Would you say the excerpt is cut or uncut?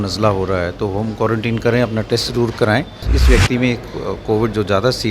cut